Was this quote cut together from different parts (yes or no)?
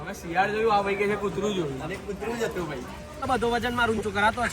yes